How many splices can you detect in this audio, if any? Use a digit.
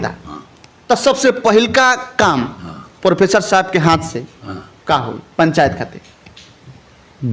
0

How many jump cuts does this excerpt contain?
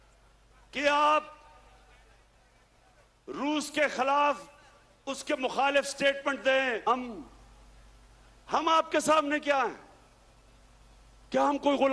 1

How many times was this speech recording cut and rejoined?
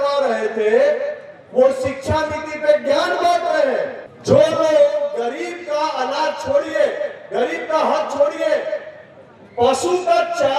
1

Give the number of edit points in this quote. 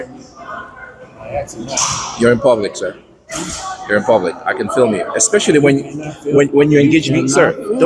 0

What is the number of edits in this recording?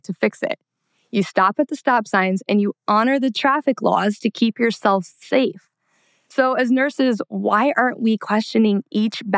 0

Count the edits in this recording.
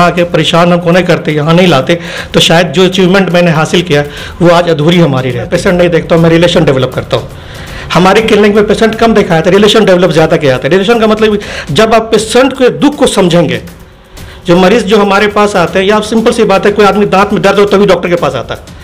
1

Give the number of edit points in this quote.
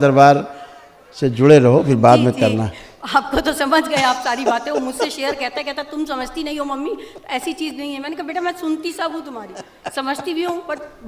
0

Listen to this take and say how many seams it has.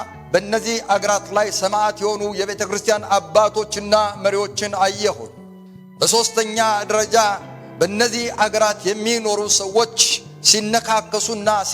0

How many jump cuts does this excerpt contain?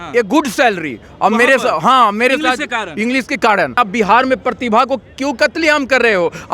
1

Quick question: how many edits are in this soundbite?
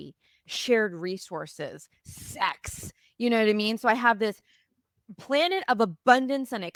0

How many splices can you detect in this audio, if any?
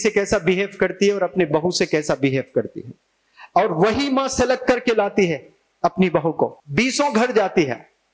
1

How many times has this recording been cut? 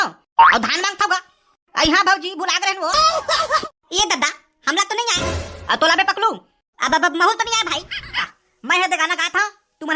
2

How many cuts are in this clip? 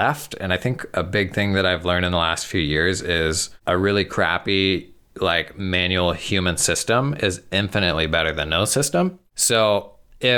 2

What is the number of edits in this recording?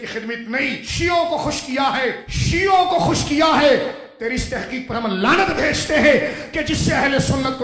2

